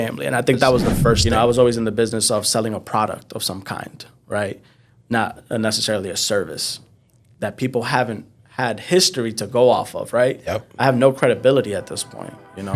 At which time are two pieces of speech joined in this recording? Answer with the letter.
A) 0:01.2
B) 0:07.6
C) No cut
A